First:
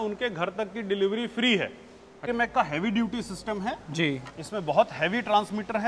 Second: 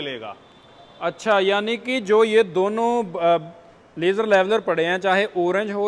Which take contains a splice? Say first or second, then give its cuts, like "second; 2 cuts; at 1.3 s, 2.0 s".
first; 1 cut; at 2.2 s